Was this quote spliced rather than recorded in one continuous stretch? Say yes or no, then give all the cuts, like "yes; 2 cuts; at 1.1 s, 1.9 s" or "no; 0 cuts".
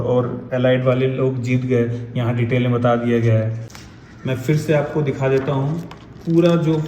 yes; 1 cut; at 3.6 s